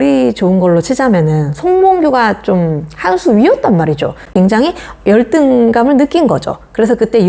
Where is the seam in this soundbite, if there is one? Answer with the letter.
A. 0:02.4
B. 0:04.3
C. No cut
B